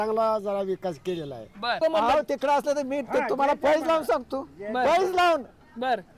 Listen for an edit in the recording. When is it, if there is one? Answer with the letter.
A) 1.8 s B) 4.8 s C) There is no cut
A